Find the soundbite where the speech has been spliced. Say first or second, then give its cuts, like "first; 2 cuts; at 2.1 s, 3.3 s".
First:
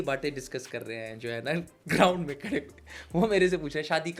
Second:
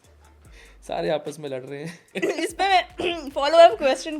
second; 1 cut; at 2.1 s